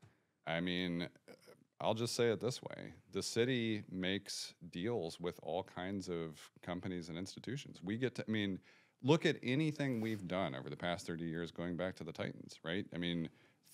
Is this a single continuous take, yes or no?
yes